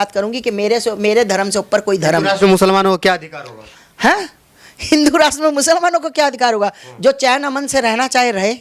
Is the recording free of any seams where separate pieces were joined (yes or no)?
yes